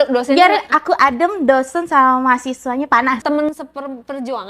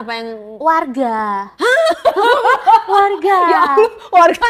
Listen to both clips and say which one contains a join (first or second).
first